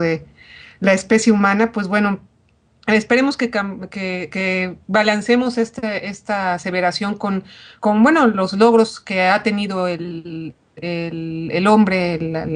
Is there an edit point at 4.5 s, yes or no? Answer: no